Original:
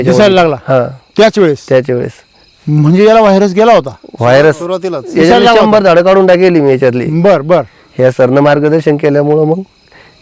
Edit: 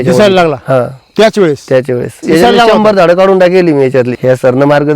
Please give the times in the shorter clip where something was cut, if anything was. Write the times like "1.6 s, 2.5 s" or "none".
2.1 s, 4.1 s